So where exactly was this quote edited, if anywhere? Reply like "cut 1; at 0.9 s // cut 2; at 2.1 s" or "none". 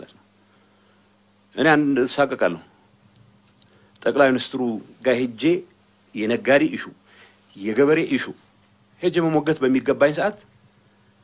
none

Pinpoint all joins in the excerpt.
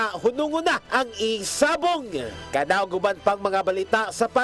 none

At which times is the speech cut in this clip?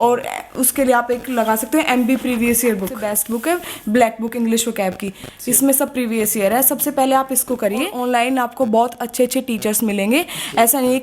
cut 1; at 3.0 s // cut 2; at 7.9 s

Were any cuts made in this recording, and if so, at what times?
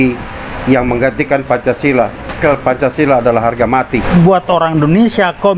cut 1; at 2.4 s // cut 2; at 4.0 s

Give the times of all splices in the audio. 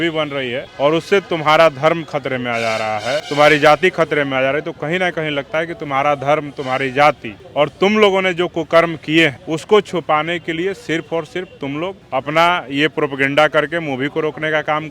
cut 1; at 3.3 s // cut 2; at 9.5 s

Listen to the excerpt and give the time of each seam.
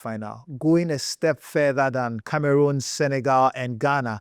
cut 1; at 2.2 s

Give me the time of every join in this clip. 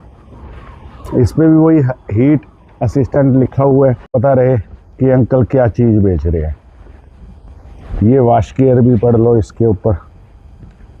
cut 1; at 4.1 s

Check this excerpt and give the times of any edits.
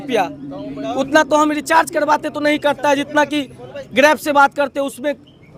none

